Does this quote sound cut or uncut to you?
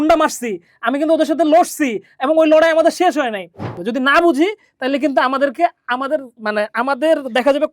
cut